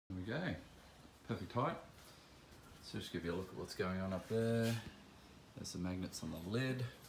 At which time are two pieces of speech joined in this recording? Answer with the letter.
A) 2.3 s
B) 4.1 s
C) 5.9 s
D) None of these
D